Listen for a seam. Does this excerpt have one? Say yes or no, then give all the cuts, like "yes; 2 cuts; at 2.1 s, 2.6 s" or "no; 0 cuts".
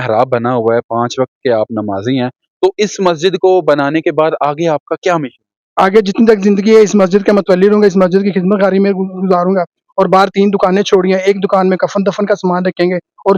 no; 0 cuts